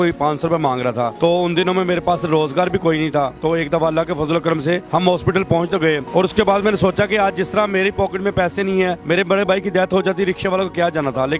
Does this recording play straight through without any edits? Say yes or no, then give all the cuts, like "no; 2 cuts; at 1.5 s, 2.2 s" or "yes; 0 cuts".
yes; 0 cuts